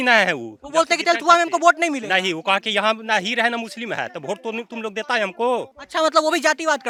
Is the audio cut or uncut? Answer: uncut